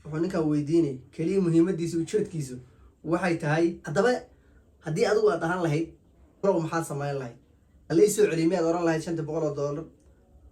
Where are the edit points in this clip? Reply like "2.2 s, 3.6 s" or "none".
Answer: 3.8 s, 6.4 s